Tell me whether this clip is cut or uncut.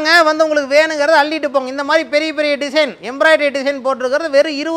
uncut